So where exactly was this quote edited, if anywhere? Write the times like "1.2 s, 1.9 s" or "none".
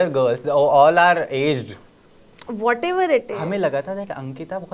3.3 s